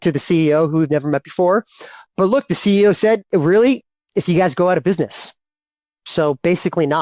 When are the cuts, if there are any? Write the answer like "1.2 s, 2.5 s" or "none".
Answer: 3.3 s